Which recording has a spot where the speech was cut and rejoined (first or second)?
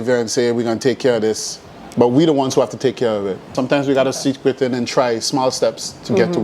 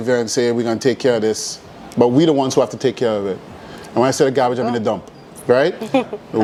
first